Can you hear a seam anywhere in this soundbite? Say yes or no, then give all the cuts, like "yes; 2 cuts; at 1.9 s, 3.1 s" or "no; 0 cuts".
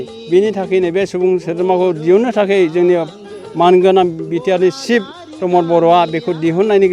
no; 0 cuts